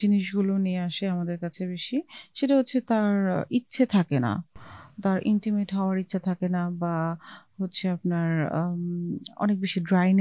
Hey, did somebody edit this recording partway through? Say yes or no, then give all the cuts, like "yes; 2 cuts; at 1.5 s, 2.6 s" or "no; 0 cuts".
no; 0 cuts